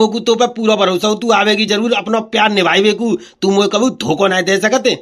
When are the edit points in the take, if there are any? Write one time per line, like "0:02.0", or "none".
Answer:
none

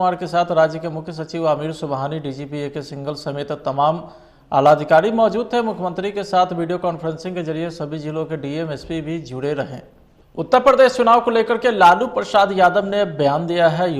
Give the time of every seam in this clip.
0:10.4

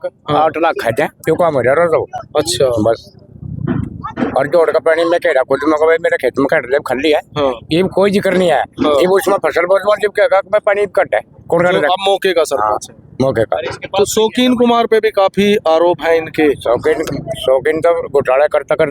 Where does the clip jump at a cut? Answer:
none

